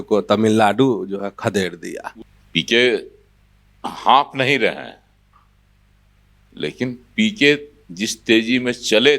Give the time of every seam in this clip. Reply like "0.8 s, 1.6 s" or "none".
2.1 s